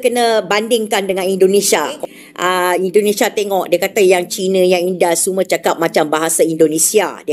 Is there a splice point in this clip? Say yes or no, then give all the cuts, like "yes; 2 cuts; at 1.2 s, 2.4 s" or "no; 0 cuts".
yes; 1 cut; at 2.0 s